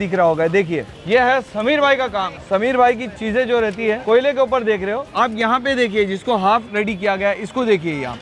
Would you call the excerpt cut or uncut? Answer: uncut